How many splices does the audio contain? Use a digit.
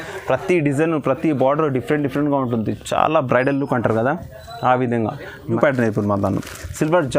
1